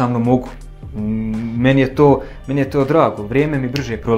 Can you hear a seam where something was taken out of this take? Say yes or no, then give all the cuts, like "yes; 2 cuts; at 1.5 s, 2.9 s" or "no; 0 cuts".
no; 0 cuts